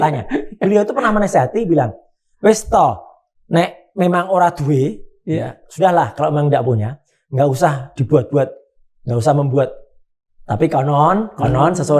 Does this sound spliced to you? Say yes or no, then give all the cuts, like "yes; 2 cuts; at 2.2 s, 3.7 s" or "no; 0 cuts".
no; 0 cuts